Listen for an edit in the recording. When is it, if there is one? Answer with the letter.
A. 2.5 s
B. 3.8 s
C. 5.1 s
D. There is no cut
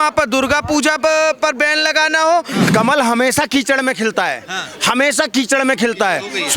A